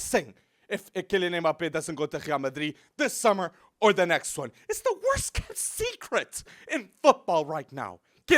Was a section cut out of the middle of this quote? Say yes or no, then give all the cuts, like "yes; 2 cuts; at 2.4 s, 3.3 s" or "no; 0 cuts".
no; 0 cuts